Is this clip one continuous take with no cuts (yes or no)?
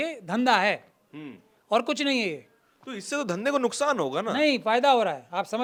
yes